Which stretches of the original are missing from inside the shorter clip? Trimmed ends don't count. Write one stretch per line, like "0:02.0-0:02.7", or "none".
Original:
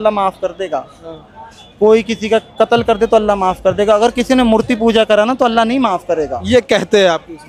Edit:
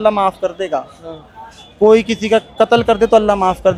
none